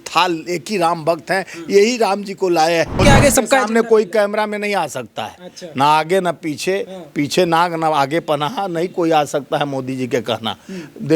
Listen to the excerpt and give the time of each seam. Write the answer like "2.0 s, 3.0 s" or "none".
3.0 s